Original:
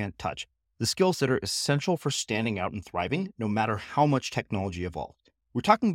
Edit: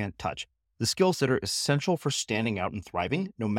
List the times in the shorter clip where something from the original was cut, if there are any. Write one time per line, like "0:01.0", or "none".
none